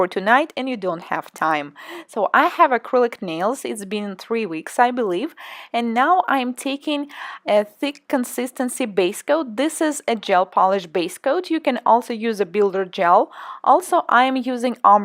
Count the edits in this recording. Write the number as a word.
zero